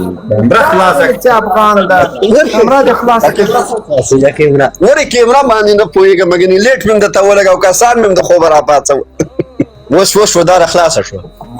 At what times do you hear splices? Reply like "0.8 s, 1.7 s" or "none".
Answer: 9.8 s